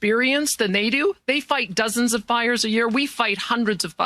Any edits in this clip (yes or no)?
no